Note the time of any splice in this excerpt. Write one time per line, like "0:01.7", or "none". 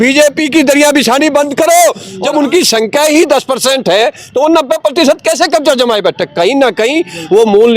0:02.1